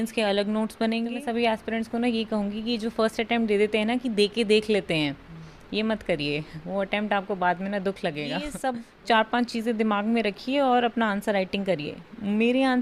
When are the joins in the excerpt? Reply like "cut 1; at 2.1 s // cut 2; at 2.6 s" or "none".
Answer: cut 1; at 1.1 s // cut 2; at 8.5 s